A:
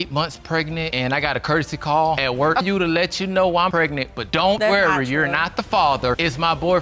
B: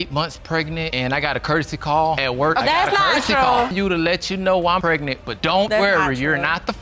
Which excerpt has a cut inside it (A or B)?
A